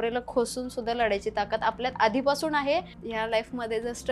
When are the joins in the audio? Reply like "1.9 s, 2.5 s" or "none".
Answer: 3.0 s